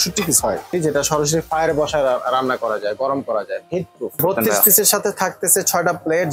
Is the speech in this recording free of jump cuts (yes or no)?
no